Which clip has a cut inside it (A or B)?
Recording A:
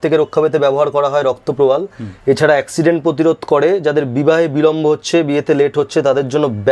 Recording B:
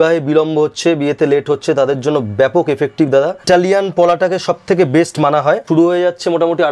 B